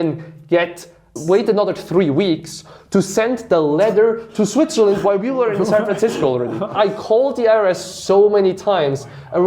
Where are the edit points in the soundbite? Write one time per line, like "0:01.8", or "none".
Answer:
0:06.7